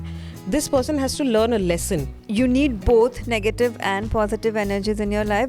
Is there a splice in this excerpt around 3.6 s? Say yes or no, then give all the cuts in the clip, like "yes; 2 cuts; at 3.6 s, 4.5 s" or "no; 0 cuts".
no; 1 cut; at 2.1 s